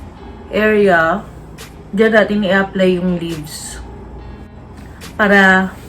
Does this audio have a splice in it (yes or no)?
yes